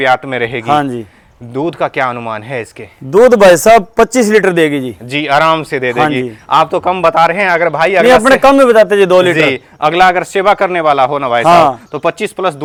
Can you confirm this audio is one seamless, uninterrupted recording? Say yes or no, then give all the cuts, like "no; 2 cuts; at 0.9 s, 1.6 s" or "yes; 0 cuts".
yes; 0 cuts